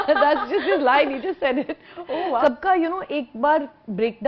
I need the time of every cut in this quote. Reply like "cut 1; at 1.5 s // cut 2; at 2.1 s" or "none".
cut 1; at 2.4 s